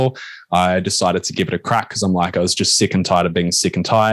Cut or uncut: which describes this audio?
uncut